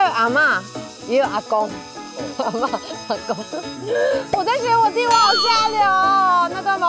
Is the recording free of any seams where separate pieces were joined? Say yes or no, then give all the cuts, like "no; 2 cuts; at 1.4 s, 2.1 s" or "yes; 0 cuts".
yes; 0 cuts